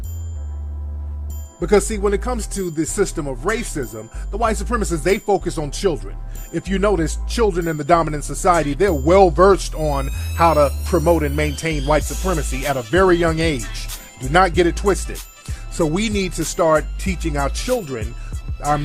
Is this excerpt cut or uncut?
cut